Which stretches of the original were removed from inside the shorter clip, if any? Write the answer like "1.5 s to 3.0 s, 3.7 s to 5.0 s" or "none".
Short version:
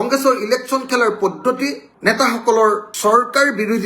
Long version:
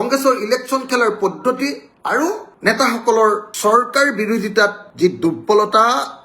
1.9 s to 2.5 s

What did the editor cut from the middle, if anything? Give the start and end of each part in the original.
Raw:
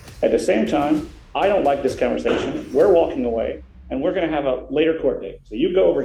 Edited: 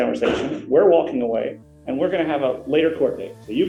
none

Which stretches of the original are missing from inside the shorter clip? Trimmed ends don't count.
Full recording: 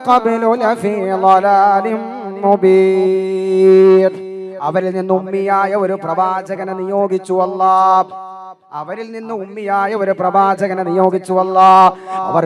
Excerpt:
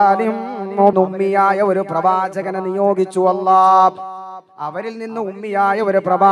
2.6 s to 5.1 s

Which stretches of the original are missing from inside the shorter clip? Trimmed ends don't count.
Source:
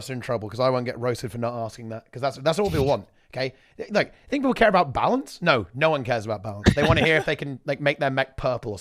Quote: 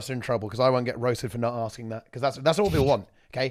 none

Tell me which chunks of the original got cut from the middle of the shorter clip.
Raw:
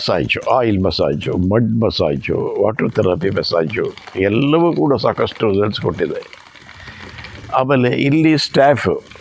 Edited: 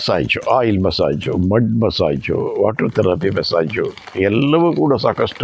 none

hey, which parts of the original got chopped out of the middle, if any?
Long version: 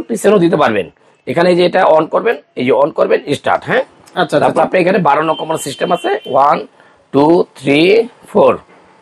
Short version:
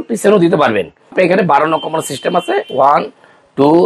1.1 s to 4.7 s

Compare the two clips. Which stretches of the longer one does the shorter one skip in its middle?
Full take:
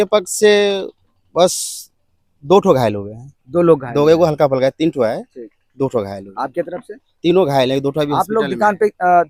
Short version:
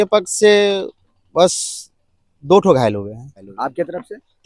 3.4 s to 6.2 s

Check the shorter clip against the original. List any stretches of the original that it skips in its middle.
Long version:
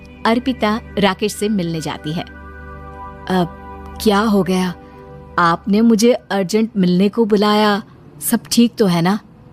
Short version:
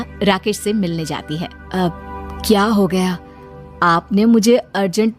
2.3 s to 3.1 s

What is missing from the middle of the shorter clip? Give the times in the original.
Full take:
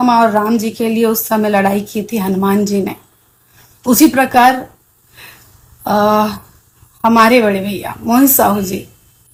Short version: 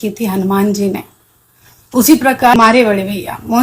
4.5 s to 7.1 s

